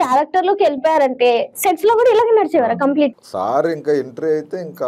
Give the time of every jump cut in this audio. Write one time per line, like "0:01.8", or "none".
0:03.2